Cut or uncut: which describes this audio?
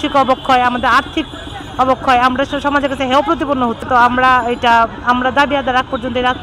cut